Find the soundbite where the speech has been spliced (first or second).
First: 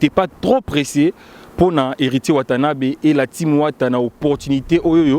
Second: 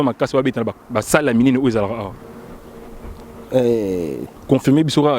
second